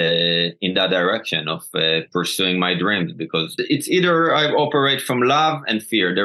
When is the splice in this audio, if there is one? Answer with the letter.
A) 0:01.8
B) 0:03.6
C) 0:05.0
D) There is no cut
B